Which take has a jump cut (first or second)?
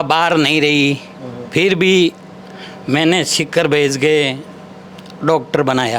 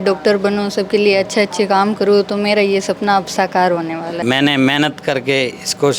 second